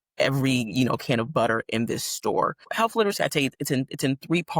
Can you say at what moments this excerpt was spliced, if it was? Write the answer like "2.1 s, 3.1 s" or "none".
2.7 s